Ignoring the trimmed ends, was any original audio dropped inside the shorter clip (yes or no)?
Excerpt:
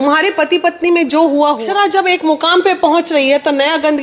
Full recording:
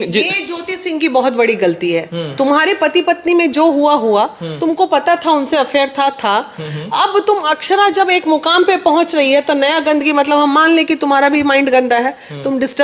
yes